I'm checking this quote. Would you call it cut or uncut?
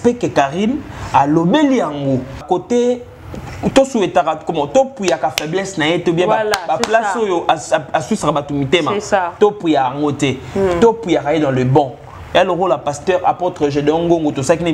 cut